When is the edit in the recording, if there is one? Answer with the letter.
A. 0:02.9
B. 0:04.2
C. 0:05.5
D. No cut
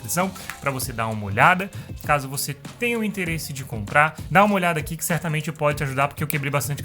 B